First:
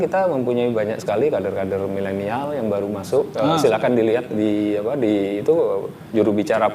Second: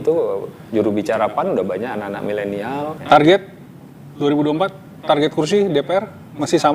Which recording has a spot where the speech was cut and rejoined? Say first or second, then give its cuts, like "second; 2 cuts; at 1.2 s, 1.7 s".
second; 1 cut; at 3.0 s